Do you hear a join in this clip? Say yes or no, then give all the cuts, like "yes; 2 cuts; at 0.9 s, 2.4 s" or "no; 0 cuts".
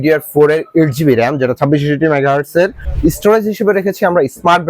yes; 1 cut; at 2.8 s